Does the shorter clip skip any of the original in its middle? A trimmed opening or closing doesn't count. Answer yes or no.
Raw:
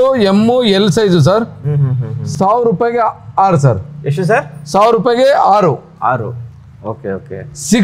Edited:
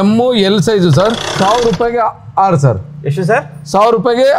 yes